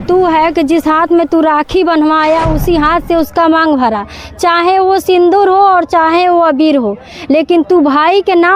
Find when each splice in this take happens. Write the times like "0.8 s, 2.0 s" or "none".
none